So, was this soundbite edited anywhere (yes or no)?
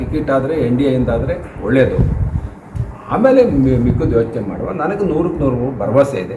no